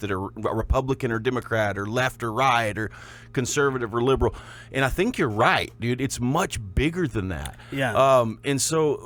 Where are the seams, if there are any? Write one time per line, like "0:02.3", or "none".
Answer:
none